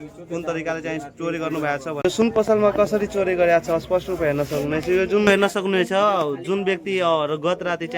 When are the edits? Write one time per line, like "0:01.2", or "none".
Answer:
0:02.0
0:05.3